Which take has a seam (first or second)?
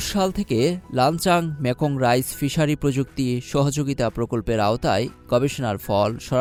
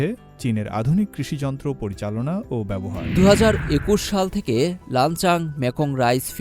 second